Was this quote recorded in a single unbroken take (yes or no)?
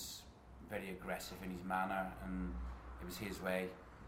yes